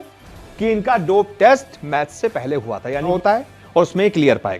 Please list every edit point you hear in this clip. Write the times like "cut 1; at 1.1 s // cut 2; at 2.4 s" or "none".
cut 1; at 3.2 s